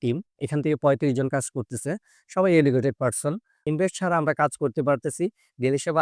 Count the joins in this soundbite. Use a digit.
1